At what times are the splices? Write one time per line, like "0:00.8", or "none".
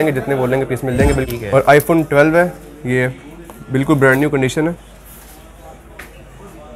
0:01.2